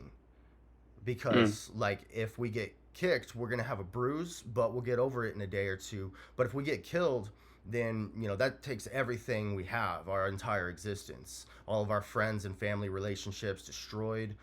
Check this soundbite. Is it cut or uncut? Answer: uncut